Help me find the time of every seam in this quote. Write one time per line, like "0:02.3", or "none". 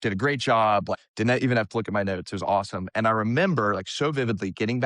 0:01.0